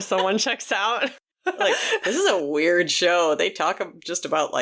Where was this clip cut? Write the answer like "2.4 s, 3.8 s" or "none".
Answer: 1.3 s